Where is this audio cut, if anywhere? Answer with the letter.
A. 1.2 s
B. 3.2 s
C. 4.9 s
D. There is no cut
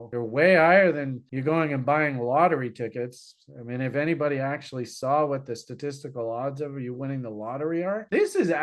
D